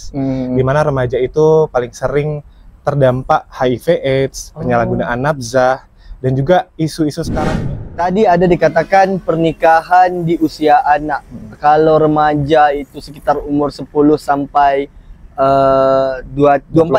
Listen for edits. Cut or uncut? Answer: cut